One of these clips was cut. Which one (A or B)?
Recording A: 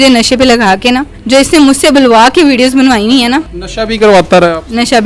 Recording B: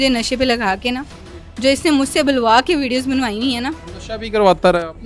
A